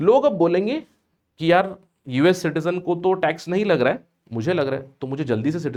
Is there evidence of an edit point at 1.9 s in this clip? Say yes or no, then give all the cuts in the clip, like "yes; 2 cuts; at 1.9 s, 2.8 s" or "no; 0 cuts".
no; 0 cuts